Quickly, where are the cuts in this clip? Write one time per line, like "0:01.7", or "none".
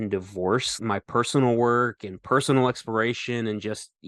none